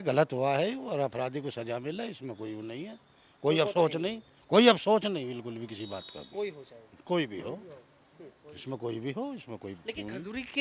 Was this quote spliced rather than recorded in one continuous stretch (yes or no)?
no